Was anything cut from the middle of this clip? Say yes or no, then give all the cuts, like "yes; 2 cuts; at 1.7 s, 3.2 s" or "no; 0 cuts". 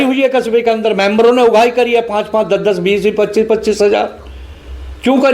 no; 0 cuts